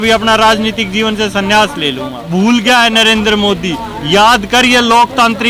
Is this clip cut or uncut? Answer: cut